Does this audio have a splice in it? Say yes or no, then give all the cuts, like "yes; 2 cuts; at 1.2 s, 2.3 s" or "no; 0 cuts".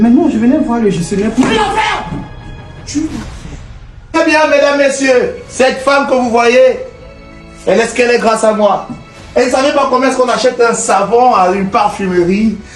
yes; 1 cut; at 4.1 s